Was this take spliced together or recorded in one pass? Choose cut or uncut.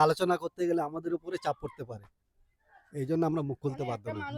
uncut